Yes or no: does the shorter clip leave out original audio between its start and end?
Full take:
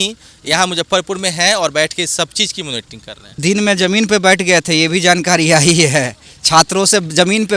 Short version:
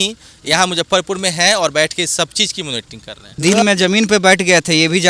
no